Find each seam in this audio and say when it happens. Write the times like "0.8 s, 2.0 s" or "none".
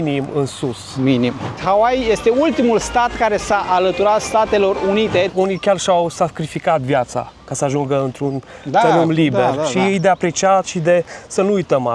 1.6 s, 5.3 s